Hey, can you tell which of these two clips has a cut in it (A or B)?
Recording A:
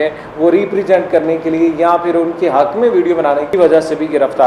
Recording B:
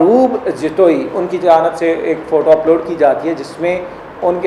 A